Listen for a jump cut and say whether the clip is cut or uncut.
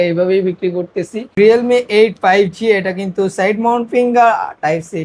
cut